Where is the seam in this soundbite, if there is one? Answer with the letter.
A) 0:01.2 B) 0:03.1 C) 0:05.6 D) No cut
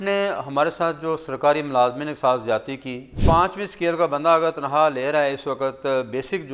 B